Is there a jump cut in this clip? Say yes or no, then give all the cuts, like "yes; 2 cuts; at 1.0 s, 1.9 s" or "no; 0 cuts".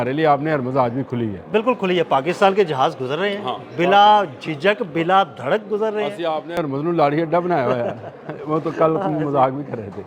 no; 0 cuts